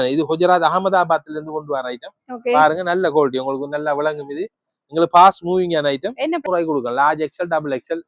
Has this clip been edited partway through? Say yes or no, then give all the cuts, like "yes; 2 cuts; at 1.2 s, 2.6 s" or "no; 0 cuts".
yes; 1 cut; at 6.4 s